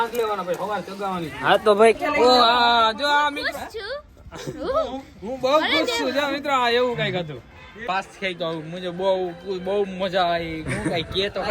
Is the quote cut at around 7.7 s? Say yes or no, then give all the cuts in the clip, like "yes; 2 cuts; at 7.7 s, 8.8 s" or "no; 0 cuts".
yes; 2 cuts; at 2.0 s, 7.7 s